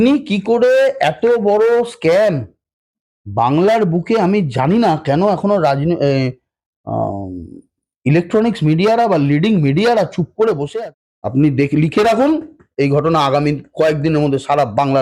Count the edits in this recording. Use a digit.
1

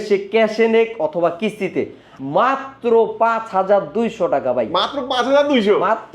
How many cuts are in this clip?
1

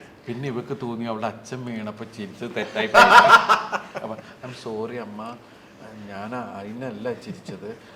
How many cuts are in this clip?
0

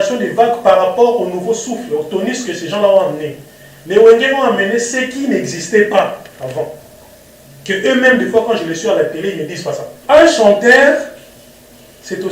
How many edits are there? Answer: 1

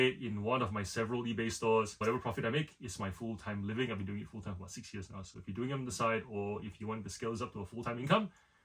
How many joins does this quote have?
1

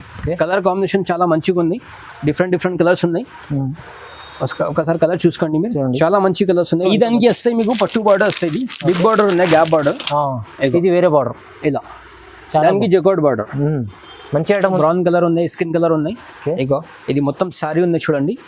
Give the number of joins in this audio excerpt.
2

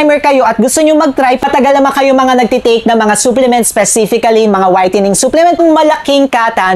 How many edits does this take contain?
2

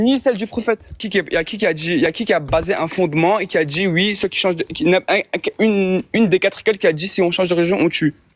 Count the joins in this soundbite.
1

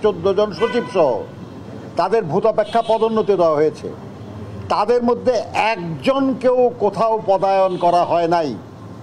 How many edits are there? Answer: 0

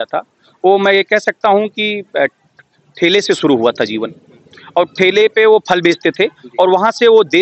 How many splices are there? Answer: 0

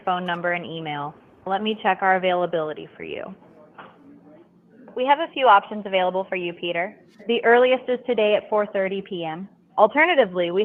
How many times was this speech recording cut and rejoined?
0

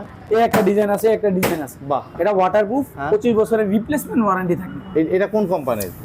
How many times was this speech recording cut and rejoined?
1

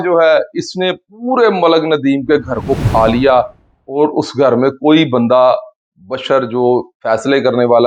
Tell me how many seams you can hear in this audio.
0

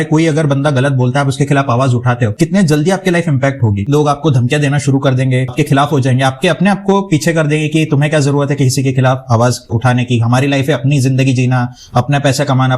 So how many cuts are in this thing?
3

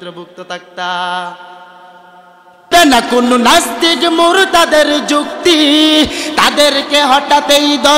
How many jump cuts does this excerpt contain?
1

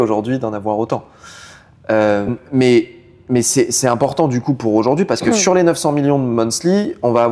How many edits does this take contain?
1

